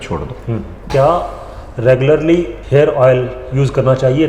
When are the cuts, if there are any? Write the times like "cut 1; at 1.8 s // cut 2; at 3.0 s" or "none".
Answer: cut 1; at 0.8 s // cut 2; at 2.6 s